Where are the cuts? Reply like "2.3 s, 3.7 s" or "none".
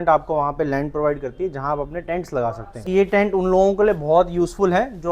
2.8 s